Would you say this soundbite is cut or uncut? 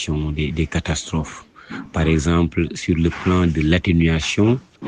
uncut